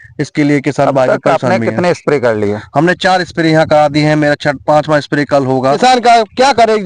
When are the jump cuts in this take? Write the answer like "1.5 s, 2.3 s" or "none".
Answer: 5.8 s